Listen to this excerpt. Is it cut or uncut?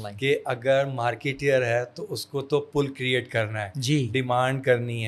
uncut